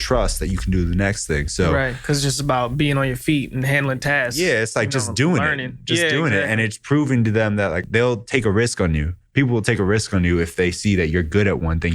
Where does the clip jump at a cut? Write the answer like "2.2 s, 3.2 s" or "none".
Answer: 7.8 s